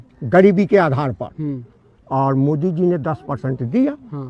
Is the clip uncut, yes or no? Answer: yes